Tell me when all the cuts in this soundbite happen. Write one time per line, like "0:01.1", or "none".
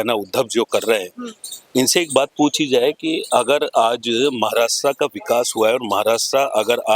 none